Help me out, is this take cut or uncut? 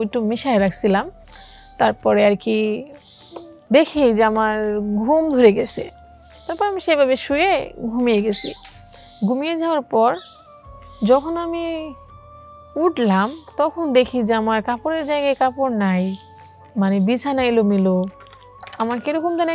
uncut